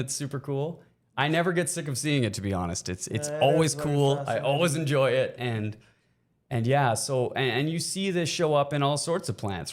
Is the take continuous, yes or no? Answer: yes